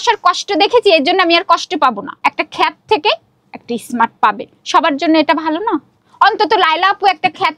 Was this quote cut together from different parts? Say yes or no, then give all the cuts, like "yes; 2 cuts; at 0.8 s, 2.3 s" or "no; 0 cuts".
yes; 2 cuts; at 2.1 s, 6.0 s